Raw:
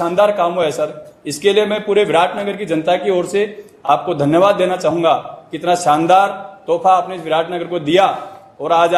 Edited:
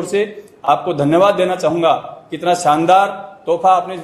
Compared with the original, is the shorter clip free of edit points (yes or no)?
yes